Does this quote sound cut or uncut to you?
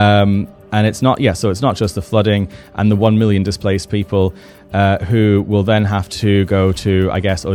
uncut